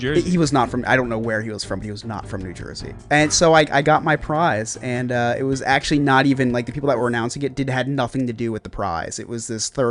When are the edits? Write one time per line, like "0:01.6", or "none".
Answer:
none